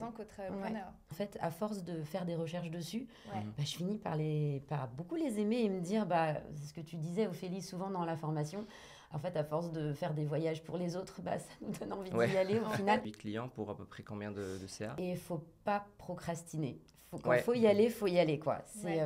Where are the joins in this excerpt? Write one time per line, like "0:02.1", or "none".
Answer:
0:01.0
0:13.1
0:14.9